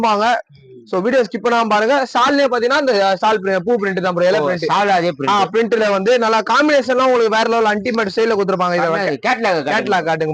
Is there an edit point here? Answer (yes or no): no